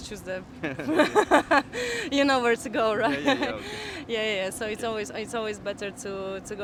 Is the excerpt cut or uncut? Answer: uncut